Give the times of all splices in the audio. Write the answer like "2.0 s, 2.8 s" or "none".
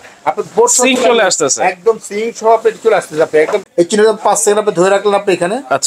3.7 s